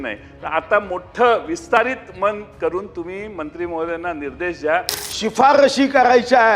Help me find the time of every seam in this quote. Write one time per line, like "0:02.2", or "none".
0:05.0